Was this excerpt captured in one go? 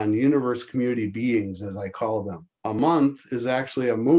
no; 1 cut; at 2.8 s

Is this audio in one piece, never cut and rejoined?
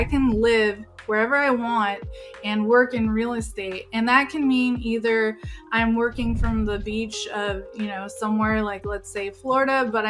yes; 0 cuts

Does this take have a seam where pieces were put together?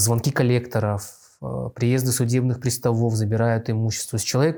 no; 0 cuts

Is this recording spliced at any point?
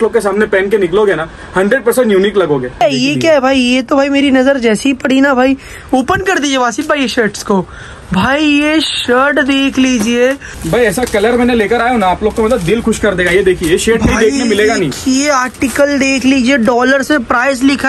yes; 2 cuts; at 2.8 s, 10.5 s

